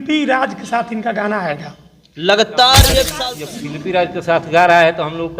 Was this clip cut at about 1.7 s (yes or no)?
no